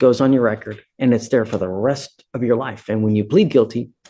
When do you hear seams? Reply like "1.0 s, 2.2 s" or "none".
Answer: none